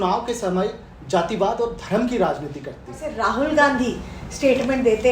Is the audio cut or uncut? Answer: cut